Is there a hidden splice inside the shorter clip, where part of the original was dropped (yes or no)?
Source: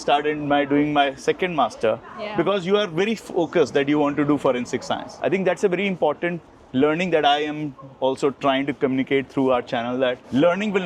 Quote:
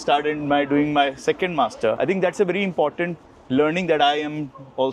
yes